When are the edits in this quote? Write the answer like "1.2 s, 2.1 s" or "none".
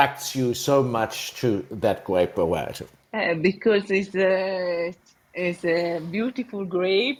none